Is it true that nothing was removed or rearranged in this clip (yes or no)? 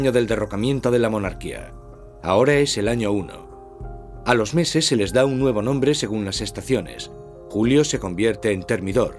yes